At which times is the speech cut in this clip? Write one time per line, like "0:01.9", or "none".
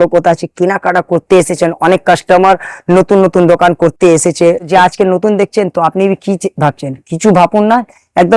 0:04.7